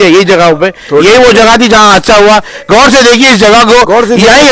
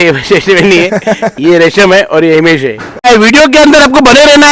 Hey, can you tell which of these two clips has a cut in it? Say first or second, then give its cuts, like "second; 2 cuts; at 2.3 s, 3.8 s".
second; 1 cut; at 3.0 s